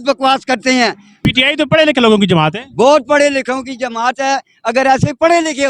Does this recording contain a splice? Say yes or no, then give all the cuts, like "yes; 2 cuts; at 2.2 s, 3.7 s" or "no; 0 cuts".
yes; 1 cut; at 1.2 s